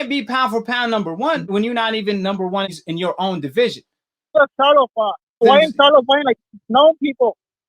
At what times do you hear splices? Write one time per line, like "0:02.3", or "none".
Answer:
0:01.4
0:04.3
0:05.4